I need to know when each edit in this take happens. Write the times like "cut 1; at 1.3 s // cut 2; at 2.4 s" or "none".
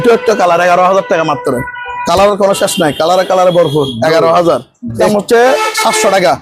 cut 1; at 5.0 s